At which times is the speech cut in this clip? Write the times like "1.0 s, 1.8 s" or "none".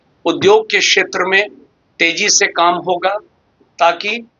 none